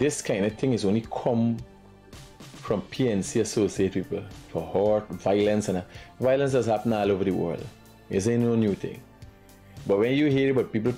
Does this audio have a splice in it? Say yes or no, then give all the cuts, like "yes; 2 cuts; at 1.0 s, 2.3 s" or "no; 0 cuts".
no; 0 cuts